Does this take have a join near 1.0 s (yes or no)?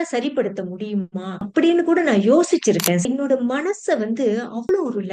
no